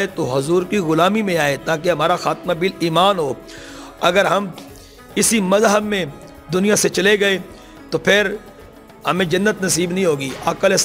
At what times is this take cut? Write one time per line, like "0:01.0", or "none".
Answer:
none